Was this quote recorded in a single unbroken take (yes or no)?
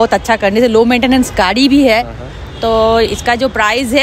yes